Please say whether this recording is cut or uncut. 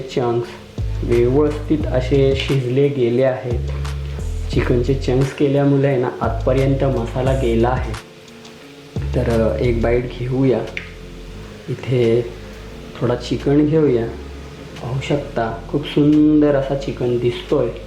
uncut